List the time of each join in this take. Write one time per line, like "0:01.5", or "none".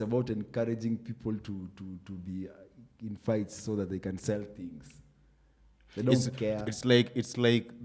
none